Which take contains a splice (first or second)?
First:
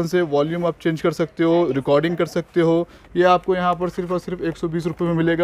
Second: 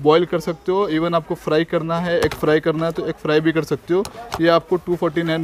first